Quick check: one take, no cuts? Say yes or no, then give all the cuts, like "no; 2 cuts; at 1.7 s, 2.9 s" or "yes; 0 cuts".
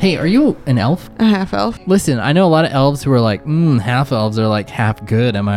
no; 2 cuts; at 1.1 s, 1.8 s